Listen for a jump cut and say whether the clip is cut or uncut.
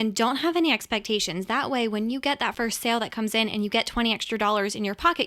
uncut